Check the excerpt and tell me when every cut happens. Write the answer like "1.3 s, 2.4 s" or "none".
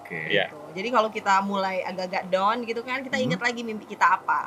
none